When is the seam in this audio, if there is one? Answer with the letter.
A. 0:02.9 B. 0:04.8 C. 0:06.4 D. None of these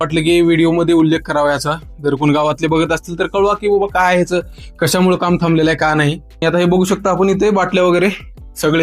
C